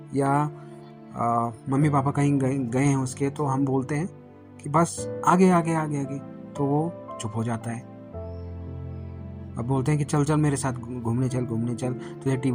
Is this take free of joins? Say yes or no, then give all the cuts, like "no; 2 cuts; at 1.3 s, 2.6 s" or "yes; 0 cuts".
no; 2 cuts; at 7.9 s, 9.4 s